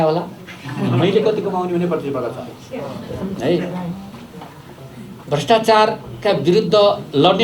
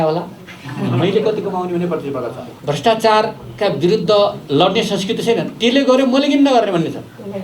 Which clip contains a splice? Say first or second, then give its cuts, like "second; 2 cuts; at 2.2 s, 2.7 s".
second; 1 cut; at 2.5 s